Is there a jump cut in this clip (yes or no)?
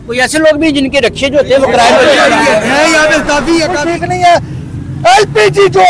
yes